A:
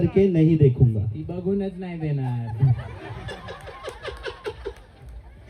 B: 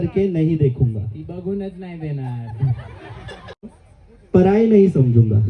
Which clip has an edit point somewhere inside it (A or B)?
B